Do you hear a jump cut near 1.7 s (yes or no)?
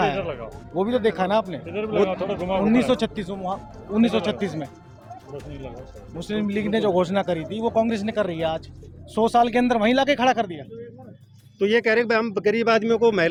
no